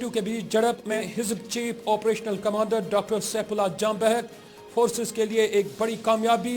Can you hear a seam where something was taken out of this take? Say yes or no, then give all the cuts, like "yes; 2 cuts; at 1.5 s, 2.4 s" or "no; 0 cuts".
yes; 1 cut; at 1.0 s